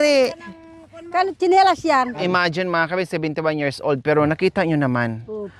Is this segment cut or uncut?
cut